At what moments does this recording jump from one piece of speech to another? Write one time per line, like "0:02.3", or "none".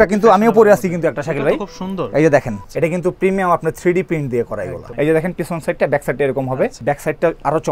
0:02.6
0:04.8
0:06.8